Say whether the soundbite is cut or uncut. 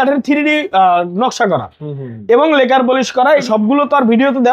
cut